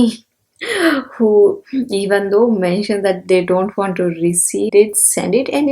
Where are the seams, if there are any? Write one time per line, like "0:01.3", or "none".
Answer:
0:04.7

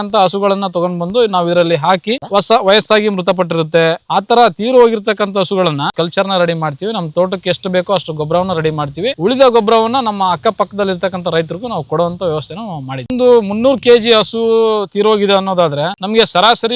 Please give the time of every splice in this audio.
0:02.2
0:05.9
0:13.1

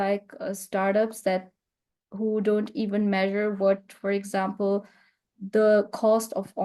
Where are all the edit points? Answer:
none

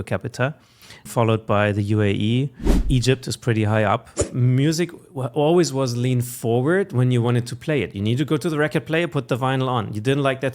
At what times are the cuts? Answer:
0:01.1
0:02.8
0:04.2

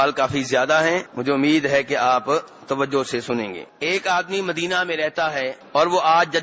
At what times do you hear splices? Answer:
0:01.1
0:03.6
0:05.6

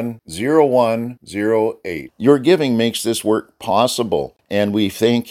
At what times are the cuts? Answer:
0:04.4

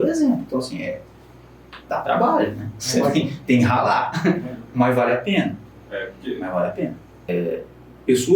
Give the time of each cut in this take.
0:07.3

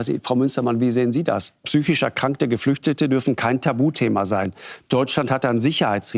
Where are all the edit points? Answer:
none

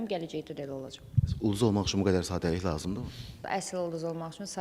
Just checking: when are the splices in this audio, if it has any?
0:03.5

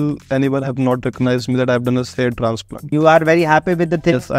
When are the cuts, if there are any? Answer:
0:02.9

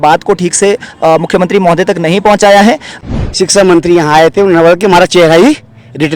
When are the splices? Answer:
0:02.9

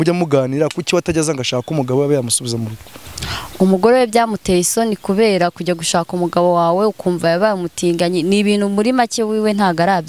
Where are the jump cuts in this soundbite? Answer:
none

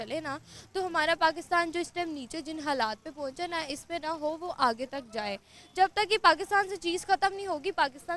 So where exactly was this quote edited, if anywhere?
none

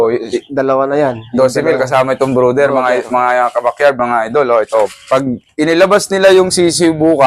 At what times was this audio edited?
0:05.0

